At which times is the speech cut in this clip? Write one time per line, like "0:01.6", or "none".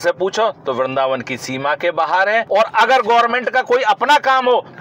none